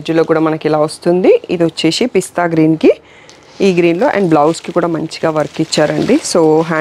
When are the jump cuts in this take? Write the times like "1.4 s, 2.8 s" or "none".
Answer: none

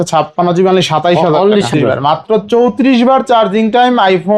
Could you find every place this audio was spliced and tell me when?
1.7 s

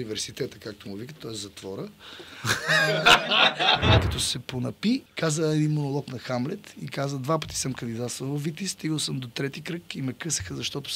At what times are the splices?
4.1 s, 5.1 s

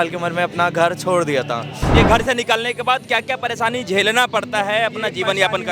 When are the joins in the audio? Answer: 1.9 s

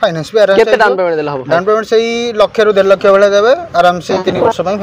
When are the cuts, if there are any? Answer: none

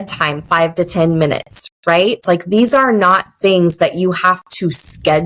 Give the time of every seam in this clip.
1.8 s

